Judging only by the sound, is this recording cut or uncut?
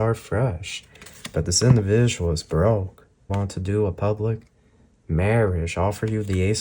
cut